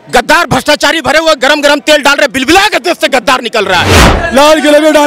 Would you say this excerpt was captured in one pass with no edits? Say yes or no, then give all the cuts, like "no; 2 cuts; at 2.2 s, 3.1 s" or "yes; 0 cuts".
no; 1 cut; at 4.0 s